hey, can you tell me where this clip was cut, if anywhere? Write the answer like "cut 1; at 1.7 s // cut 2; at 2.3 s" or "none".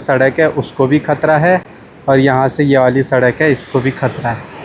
none